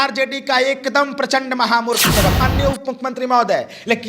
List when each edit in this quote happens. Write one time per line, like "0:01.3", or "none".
0:02.4

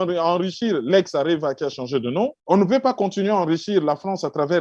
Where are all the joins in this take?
0:02.4

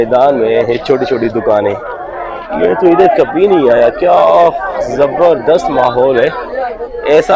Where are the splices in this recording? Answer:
0:02.4

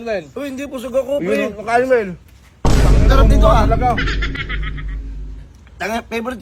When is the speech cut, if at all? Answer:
none

